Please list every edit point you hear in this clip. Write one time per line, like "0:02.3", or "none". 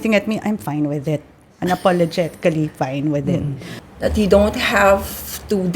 0:03.6